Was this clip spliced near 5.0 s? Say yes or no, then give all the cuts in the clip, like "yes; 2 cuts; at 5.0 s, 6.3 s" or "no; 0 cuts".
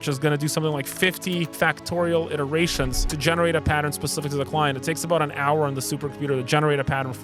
no; 1 cut; at 1.5 s